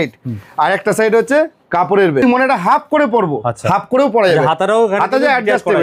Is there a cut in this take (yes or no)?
yes